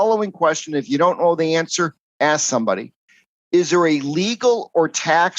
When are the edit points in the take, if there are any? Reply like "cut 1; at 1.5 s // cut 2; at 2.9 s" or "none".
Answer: none